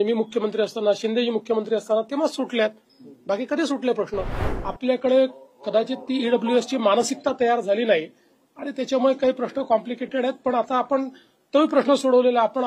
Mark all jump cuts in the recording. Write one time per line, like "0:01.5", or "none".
0:04.4